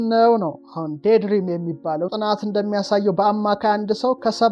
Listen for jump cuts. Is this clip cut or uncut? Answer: cut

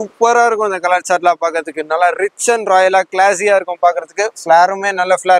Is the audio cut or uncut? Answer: uncut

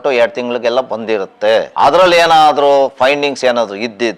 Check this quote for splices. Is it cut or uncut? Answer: cut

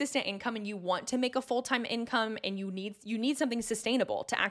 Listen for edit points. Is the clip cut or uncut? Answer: uncut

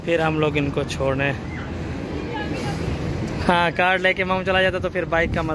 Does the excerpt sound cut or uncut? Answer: uncut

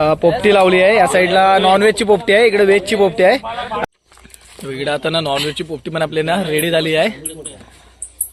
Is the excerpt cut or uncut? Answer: cut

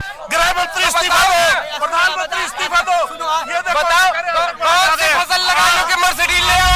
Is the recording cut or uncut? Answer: uncut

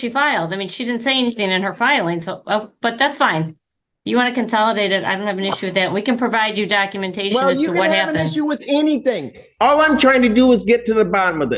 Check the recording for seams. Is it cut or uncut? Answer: uncut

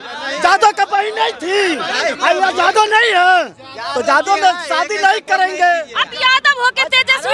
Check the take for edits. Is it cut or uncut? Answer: uncut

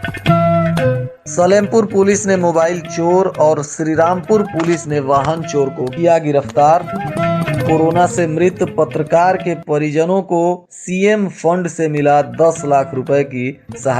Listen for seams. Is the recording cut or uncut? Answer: cut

